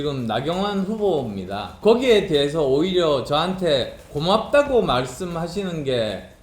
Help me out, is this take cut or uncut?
cut